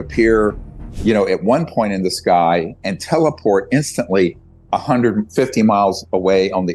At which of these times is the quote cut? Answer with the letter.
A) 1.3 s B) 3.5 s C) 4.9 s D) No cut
D